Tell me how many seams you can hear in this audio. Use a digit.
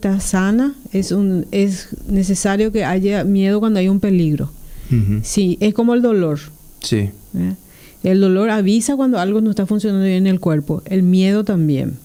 0